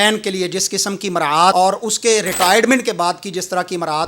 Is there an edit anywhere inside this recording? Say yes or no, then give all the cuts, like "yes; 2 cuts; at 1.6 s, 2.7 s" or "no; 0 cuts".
yes; 1 cut; at 1.5 s